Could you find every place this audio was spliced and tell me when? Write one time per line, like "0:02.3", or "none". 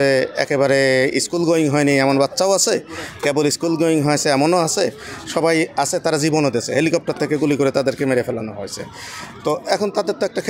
none